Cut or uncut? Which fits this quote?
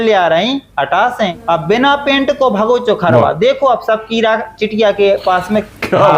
cut